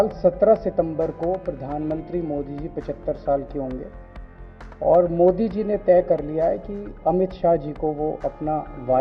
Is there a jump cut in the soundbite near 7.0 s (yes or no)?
no